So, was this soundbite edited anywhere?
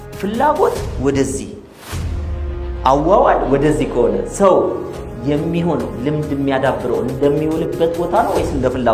no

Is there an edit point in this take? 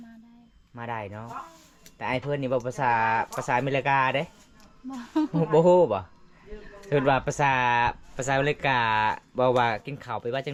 no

